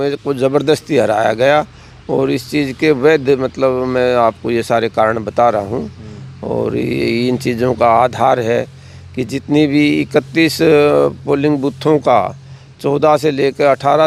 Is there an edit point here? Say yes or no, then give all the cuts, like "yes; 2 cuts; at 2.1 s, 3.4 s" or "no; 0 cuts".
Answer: no; 0 cuts